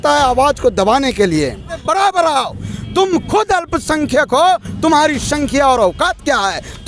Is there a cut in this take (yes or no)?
yes